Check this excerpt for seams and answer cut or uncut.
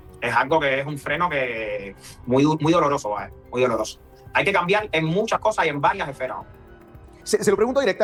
uncut